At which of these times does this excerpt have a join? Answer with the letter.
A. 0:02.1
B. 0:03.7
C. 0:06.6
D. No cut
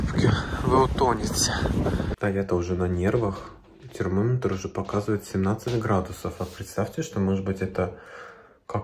A